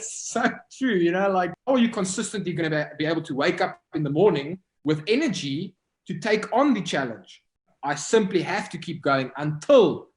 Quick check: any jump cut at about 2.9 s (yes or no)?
no